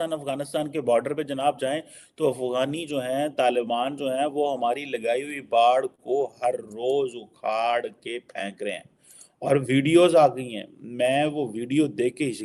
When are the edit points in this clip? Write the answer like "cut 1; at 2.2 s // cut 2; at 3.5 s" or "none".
none